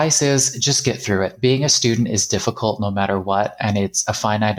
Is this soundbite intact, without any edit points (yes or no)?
yes